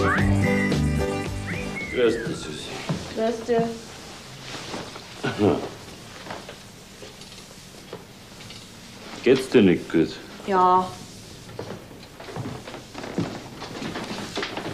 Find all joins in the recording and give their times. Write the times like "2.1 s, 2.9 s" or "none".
10.6 s